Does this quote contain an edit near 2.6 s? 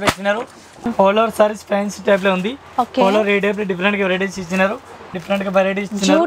no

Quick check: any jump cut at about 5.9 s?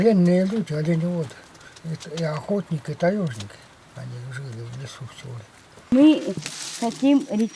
yes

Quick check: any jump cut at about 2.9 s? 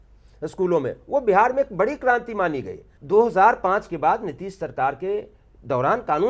yes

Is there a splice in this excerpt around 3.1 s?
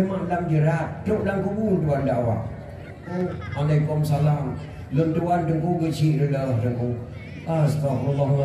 yes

